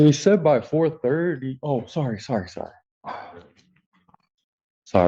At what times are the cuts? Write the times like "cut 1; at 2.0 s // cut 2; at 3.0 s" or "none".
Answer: none